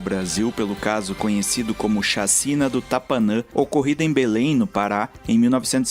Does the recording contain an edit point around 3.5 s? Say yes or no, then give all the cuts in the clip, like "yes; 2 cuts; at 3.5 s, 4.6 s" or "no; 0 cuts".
yes; 1 cut; at 3.5 s